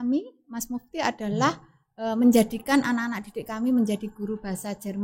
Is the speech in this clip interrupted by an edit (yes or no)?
no